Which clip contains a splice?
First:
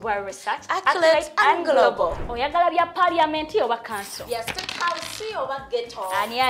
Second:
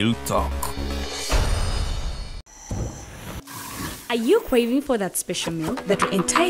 second; 1 cut; at 2.2 s

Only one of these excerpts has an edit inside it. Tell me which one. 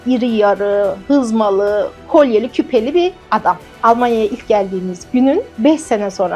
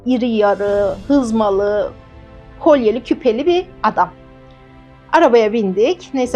first; 3 cuts; at 2.0 s, 3.7 s, 5.5 s

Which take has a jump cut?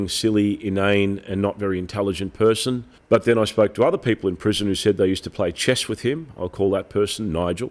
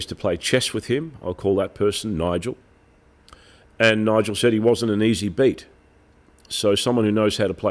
first; 1 cut; at 2.9 s

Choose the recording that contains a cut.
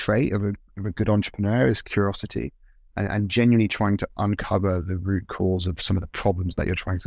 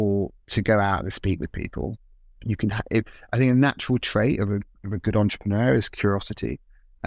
second; 1 cut; at 2.0 s

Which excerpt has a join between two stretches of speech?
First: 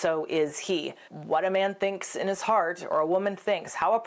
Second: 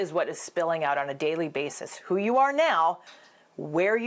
first; 1 cut; at 1.0 s

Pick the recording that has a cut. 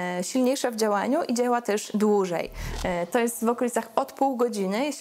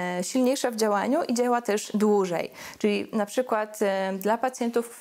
first; 1 cut; at 2.6 s

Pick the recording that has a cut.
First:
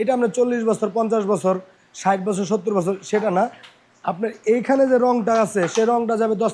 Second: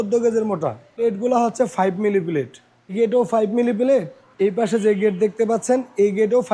second; 3 cuts; at 0.9 s, 2.9 s, 4.2 s

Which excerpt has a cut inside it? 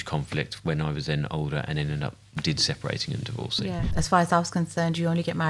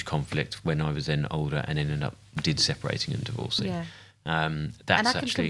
first; 1 cut; at 3.9 s

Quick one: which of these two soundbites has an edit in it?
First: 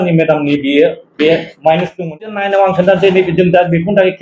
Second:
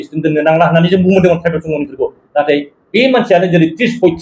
first; 1 cut; at 2.3 s

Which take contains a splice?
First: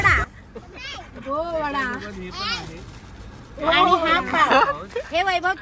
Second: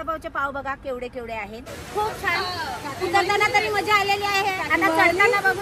second; 1 cut; at 1.6 s

